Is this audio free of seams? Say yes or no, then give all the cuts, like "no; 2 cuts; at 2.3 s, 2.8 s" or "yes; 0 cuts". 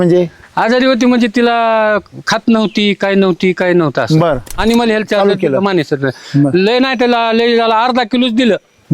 no; 1 cut; at 4.5 s